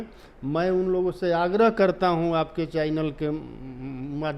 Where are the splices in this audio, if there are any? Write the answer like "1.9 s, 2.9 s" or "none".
none